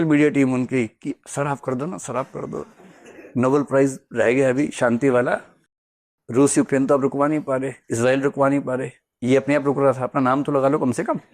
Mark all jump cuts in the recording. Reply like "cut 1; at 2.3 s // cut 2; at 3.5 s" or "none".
none

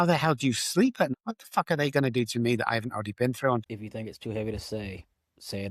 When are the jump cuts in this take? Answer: cut 1; at 1.1 s // cut 2; at 3.6 s

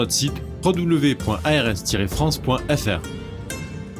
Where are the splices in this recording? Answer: cut 1; at 3.0 s

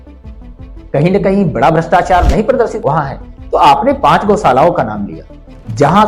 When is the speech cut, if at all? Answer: cut 1; at 2.8 s

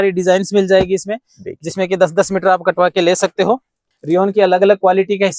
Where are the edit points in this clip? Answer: cut 1; at 3.9 s

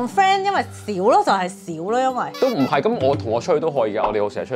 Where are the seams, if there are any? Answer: cut 1; at 2.3 s

